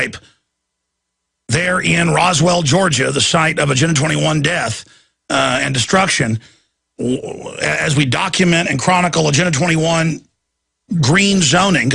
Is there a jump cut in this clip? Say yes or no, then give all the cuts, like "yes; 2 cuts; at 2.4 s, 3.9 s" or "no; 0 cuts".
no; 0 cuts